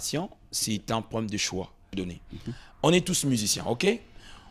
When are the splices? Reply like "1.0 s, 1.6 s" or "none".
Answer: 1.9 s

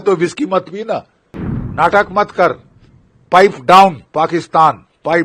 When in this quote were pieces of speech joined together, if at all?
1.6 s

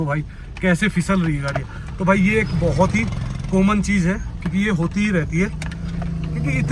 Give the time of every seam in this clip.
none

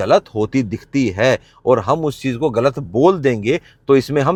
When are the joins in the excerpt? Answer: none

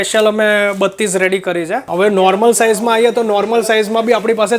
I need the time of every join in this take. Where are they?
1.9 s

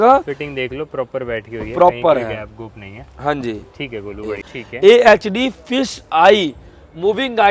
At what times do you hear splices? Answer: 4.4 s

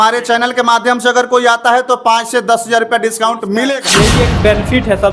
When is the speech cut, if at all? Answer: 3.9 s

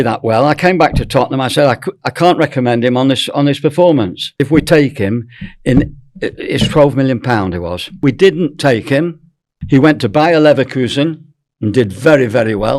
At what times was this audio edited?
4.4 s, 7.8 s

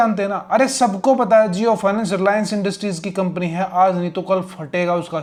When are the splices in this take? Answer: none

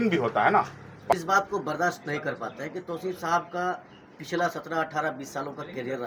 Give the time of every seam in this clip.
1.1 s

